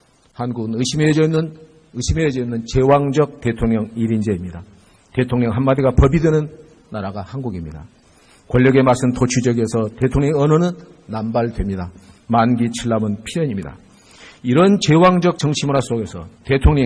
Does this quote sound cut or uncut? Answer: cut